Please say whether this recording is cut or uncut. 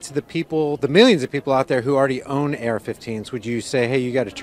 uncut